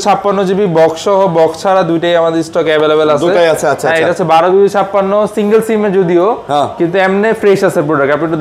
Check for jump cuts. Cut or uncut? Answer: uncut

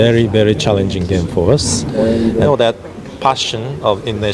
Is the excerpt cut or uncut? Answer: cut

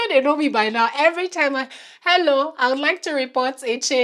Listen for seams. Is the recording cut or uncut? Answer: uncut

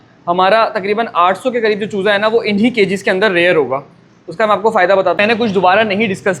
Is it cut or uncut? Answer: cut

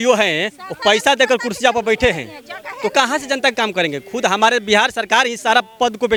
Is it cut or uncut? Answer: uncut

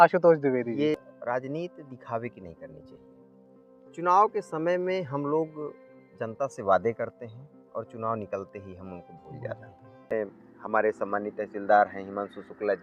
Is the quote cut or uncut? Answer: cut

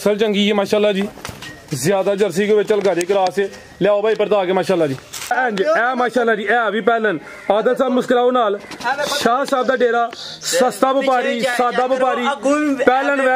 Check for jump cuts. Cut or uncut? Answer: cut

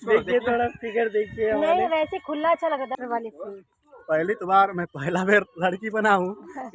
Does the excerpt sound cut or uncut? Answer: cut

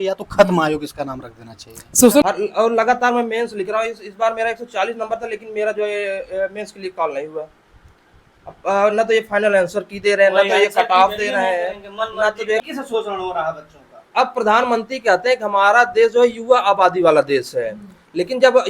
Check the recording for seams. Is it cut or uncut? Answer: cut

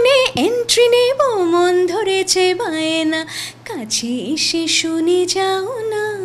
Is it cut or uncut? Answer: uncut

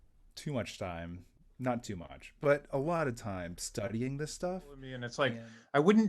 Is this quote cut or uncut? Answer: cut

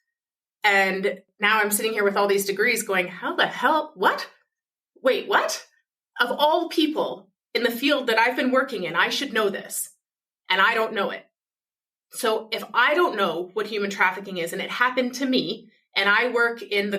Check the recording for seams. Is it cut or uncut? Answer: cut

